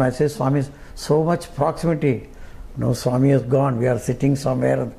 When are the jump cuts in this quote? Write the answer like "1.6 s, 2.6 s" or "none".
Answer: none